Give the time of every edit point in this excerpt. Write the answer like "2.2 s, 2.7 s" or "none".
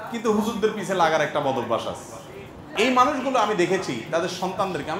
2.6 s